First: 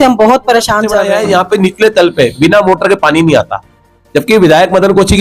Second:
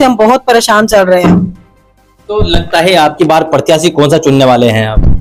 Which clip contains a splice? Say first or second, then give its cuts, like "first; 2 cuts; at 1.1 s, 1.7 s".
first; 1 cut; at 1.0 s